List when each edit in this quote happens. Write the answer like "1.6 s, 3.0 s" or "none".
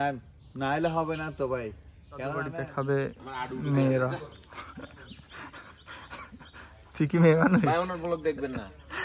2.6 s